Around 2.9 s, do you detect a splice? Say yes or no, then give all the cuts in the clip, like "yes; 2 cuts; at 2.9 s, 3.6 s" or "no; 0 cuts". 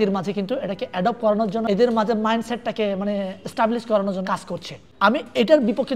no; 2 cuts; at 1.6 s, 4.3 s